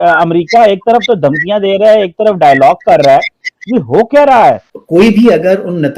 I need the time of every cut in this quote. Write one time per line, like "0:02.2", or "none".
0:04.7